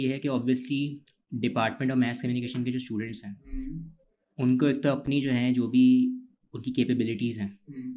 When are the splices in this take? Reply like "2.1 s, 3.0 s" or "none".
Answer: none